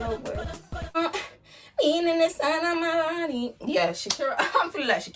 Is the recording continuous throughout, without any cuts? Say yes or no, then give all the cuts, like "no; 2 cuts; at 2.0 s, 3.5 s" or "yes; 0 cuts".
no; 1 cut; at 1.0 s